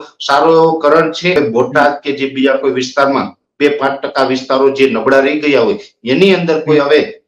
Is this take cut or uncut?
cut